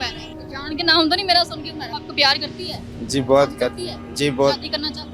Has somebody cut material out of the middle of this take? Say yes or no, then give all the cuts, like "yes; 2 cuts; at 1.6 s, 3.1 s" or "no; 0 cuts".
yes; 1 cut; at 1.9 s